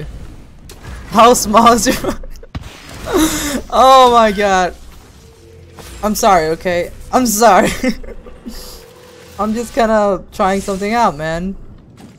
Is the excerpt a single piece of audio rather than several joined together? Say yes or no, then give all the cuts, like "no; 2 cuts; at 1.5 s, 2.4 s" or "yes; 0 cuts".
yes; 0 cuts